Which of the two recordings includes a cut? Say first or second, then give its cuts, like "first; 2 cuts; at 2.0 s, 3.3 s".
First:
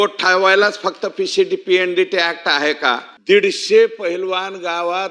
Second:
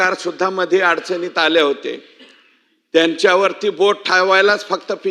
first; 1 cut; at 3.1 s